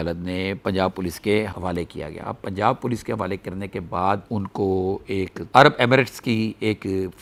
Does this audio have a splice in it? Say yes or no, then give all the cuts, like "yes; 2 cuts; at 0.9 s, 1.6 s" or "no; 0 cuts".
no; 0 cuts